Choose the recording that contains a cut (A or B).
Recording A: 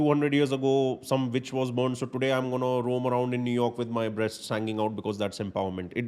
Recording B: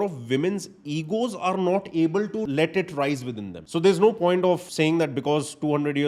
B